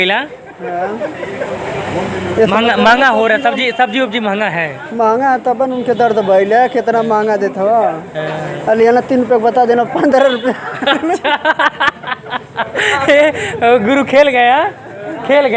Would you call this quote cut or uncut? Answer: uncut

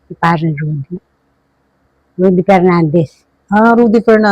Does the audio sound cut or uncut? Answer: uncut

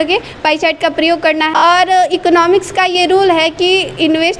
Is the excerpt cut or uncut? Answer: cut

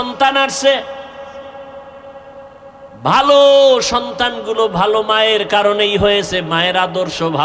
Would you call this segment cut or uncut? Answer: uncut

